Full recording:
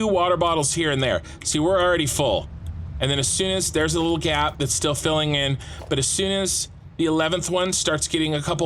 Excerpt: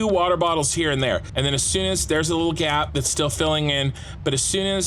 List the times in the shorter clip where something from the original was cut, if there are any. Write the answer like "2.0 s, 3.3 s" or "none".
1.3 s